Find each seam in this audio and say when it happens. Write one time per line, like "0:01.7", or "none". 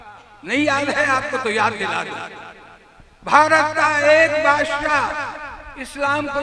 none